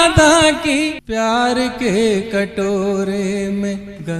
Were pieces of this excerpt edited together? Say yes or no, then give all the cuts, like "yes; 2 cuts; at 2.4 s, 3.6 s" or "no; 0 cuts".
yes; 1 cut; at 1.0 s